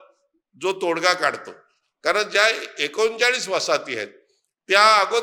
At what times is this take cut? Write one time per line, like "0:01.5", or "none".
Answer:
none